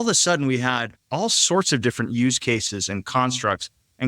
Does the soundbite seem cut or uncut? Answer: cut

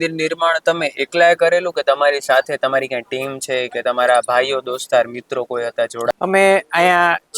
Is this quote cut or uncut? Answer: cut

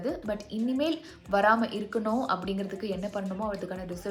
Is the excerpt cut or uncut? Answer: uncut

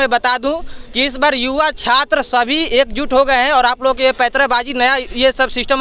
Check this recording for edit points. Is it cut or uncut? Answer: uncut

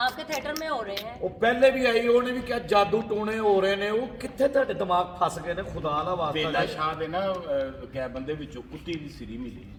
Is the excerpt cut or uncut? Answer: uncut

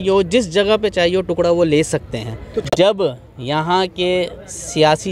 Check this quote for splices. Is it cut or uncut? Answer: cut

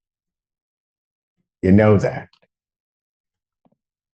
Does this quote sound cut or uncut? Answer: cut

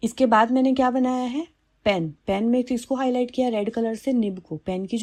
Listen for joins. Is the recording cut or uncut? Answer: uncut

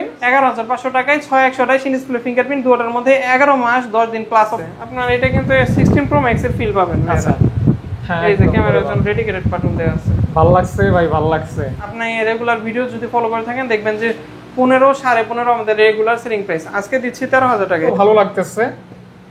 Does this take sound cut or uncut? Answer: cut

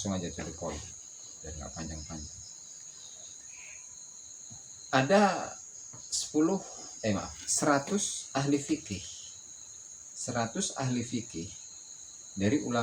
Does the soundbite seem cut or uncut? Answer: uncut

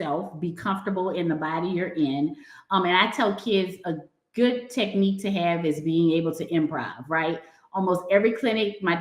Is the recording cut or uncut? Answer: uncut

